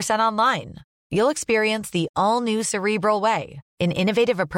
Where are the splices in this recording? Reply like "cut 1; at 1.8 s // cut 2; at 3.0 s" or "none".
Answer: none